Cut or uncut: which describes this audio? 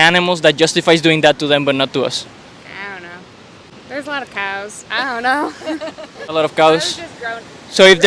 cut